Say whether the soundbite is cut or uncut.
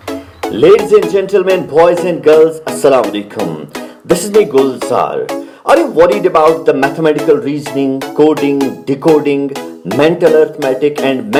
uncut